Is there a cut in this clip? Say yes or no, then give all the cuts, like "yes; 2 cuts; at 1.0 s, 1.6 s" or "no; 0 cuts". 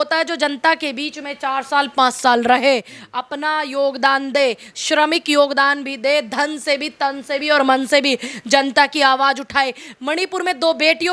no; 0 cuts